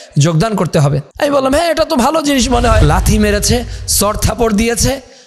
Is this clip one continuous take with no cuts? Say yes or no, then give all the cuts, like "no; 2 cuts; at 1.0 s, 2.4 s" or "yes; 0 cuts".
no; 2 cuts; at 1.1 s, 2.8 s